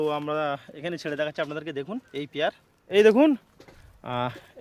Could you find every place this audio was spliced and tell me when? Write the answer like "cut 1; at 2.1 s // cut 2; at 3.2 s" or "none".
cut 1; at 2.9 s

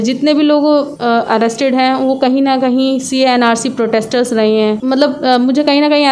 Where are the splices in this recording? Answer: cut 1; at 0.9 s // cut 2; at 4.8 s

